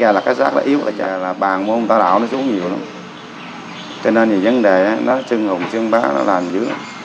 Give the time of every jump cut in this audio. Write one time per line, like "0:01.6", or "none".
0:01.2

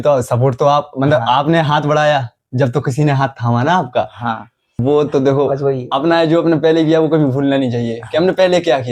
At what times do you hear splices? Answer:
0:04.8

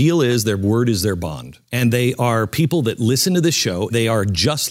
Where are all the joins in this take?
0:01.6
0:03.9

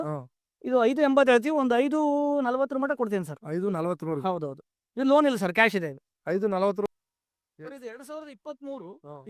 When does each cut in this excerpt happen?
0:06.9

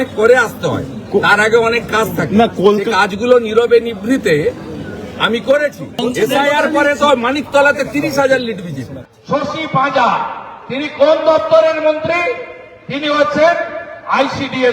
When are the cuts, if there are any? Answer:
0:06.0
0:09.2

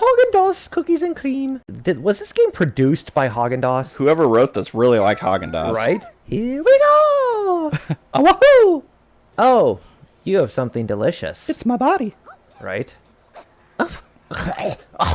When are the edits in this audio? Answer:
0:01.5

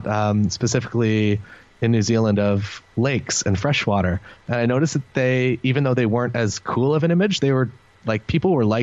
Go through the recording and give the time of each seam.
none

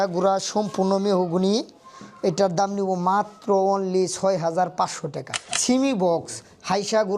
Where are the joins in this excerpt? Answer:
0:05.5

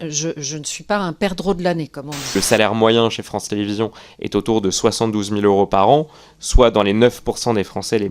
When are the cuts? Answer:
0:02.3

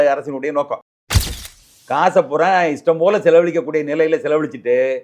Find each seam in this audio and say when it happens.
0:01.3

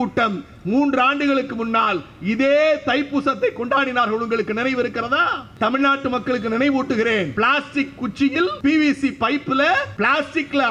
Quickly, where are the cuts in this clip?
0:05.4
0:07.3
0:08.6
0:09.9

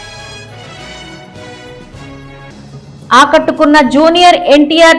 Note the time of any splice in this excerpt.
none

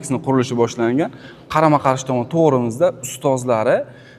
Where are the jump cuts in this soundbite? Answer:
none

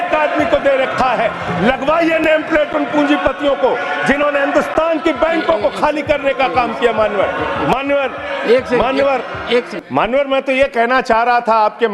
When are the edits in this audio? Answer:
none

